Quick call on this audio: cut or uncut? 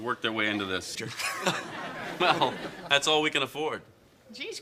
uncut